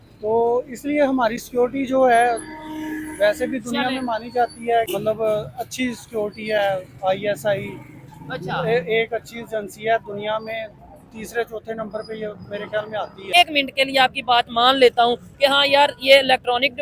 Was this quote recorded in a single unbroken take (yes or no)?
no